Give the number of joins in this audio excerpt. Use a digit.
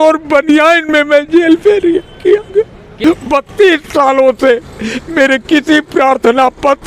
1